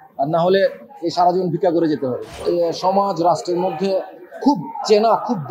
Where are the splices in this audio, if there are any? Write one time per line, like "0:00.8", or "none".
0:02.3